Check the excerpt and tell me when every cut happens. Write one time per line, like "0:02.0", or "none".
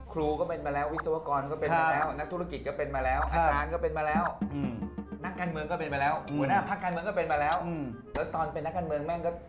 none